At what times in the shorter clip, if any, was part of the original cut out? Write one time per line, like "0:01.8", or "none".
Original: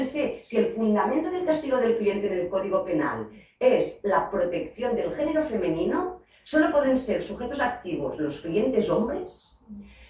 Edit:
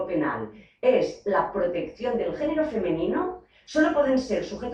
none